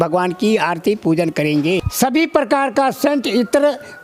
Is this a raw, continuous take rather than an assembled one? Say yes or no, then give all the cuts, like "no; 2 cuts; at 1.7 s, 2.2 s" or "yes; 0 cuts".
no; 1 cut; at 1.9 s